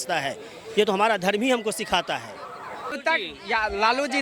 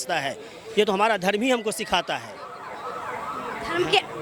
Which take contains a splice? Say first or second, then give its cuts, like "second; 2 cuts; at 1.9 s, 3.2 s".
first; 1 cut; at 3.0 s